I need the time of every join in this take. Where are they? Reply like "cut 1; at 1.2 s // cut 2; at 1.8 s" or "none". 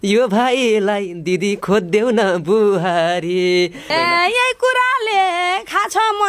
cut 1; at 3.8 s